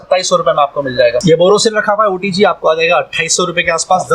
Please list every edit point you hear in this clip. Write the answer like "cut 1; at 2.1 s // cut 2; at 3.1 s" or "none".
cut 1; at 1.2 s